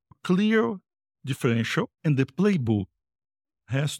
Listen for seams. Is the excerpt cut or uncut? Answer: cut